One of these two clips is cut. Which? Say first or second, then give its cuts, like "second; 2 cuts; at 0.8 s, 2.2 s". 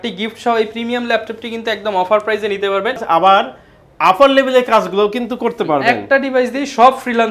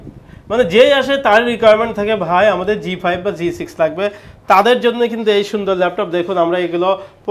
first; 1 cut; at 3.0 s